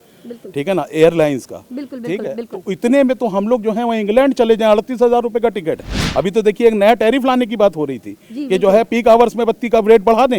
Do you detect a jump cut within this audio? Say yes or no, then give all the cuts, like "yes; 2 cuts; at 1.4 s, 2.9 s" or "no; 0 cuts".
yes; 1 cut; at 6.0 s